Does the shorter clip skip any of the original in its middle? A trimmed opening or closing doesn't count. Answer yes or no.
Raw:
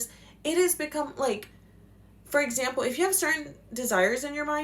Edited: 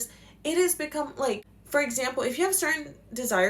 yes